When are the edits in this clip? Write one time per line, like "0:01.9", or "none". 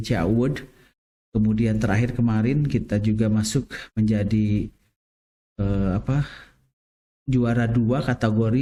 none